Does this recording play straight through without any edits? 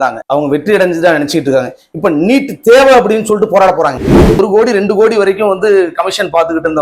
no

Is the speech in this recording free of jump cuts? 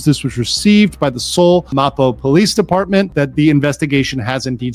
no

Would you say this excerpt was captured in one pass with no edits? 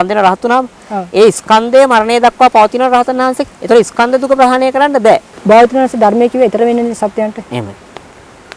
no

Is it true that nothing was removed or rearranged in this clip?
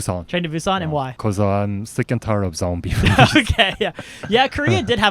no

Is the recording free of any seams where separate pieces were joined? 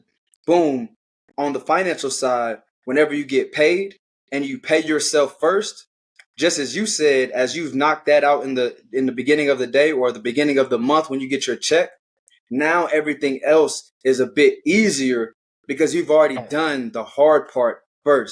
yes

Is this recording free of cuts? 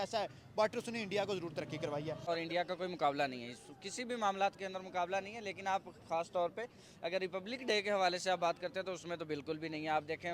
no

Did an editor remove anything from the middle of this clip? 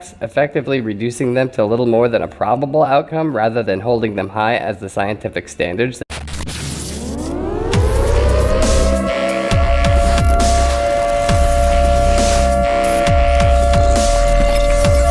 no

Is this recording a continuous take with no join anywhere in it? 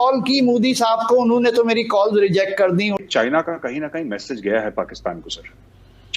no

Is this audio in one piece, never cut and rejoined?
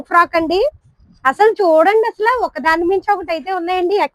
yes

